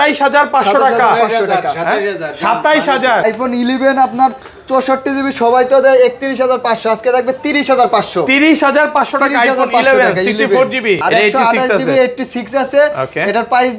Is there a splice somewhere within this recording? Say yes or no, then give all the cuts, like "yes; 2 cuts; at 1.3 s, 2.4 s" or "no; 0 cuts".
yes; 2 cuts; at 3.2 s, 11.0 s